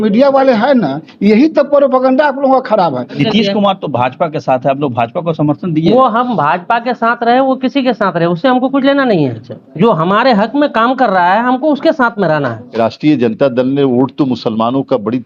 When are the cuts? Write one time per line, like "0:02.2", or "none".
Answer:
0:03.1
0:12.6